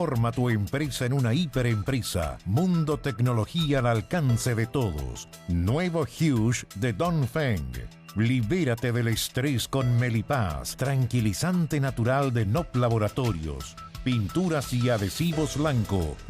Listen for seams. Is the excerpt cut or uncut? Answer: cut